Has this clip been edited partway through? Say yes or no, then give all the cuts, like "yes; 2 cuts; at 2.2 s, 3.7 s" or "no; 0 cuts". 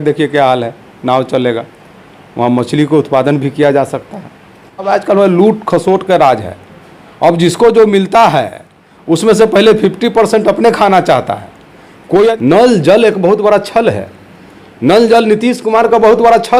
yes; 2 cuts; at 4.9 s, 12.3 s